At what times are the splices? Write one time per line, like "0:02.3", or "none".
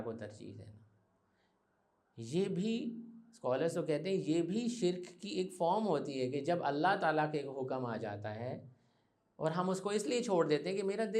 none